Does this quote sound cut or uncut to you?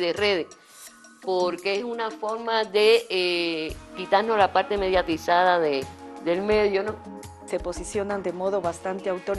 cut